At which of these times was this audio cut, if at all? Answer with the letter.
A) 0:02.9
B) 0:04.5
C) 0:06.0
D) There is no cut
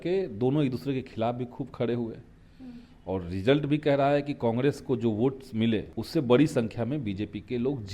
C